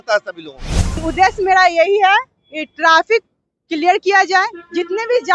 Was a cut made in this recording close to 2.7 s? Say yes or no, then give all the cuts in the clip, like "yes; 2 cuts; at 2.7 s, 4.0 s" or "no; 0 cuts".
no; 1 cut; at 1.0 s